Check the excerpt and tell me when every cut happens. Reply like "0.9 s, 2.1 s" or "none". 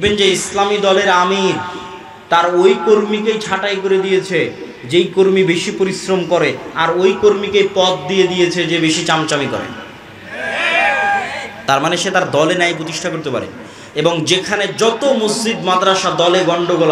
none